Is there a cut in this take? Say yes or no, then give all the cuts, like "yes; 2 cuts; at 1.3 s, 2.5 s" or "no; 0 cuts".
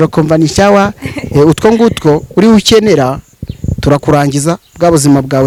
no; 0 cuts